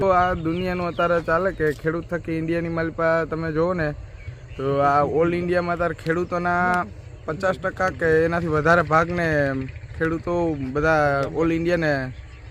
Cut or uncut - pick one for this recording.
uncut